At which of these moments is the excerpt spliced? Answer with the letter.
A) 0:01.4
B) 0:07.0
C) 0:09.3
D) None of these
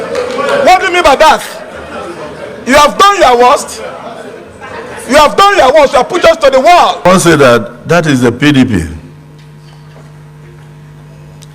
B